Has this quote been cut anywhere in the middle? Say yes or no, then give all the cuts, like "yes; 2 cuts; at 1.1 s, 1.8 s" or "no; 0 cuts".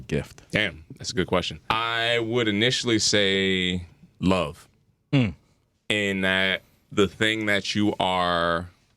yes; 2 cuts; at 1.6 s, 4.0 s